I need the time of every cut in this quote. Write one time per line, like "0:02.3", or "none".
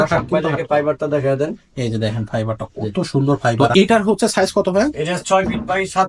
0:03.6